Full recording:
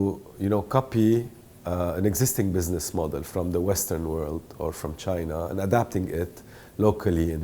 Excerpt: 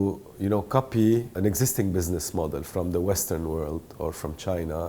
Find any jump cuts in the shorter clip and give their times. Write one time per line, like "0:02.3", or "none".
0:01.3